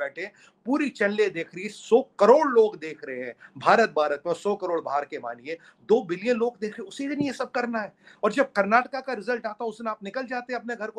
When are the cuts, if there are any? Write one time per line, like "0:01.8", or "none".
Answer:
none